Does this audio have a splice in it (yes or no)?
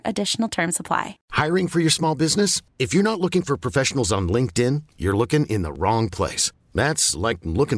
yes